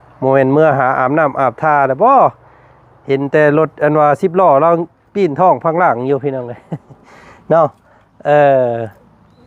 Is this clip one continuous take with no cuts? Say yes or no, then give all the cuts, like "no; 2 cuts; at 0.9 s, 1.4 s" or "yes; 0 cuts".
yes; 0 cuts